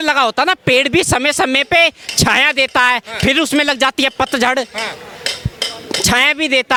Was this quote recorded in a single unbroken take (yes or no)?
yes